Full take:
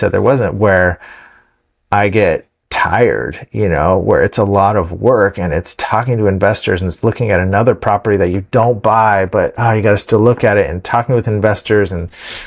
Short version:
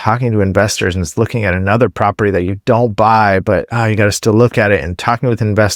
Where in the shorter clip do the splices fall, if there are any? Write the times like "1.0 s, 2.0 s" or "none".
none